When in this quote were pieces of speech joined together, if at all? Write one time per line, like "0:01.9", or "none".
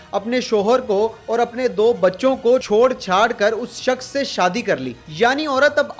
0:02.6
0:05.0